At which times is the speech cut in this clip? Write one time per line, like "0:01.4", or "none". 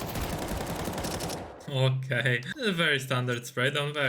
0:02.5